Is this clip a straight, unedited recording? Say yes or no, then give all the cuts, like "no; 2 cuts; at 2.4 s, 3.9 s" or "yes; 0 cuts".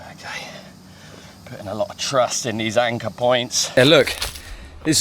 no; 1 cut; at 3.7 s